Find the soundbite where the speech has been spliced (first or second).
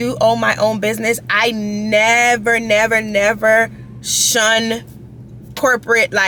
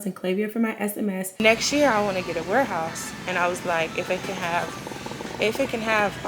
second